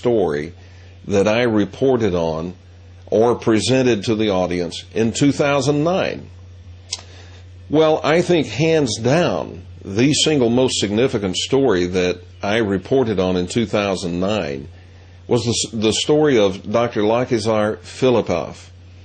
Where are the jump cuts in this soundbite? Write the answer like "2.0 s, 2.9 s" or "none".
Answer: 6.0 s

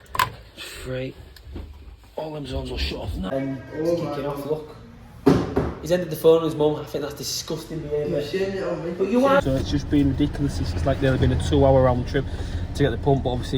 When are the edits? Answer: 3.3 s, 9.4 s

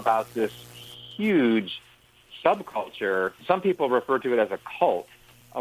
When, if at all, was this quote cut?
none

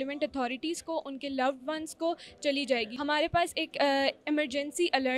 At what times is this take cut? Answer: 2.9 s

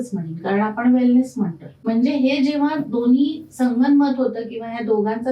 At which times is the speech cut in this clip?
1.7 s

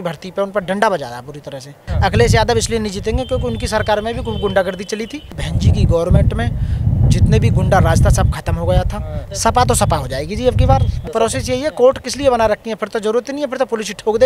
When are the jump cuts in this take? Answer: 1.9 s, 5.4 s, 9.2 s, 11.1 s

